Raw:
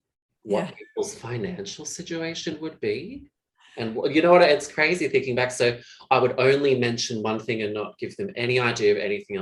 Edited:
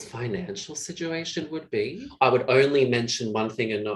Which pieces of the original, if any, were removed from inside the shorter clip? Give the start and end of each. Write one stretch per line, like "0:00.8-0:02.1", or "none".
0:03.1-0:05.9